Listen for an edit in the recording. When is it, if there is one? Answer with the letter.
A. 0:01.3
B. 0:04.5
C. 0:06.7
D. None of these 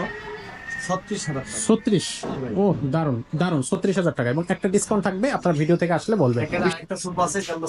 C